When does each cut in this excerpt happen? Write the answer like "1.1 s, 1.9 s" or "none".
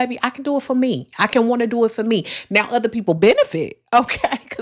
none